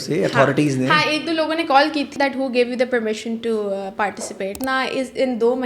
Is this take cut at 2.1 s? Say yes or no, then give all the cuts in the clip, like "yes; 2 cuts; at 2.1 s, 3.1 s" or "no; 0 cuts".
yes; 2 cuts; at 2.1 s, 4.6 s